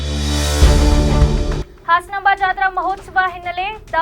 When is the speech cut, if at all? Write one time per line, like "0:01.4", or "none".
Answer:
0:01.7